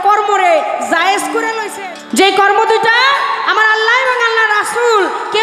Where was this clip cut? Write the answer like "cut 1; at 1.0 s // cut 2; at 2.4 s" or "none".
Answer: cut 1; at 1.7 s